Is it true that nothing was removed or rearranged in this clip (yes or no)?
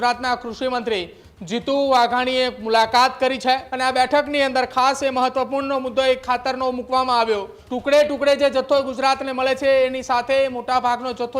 no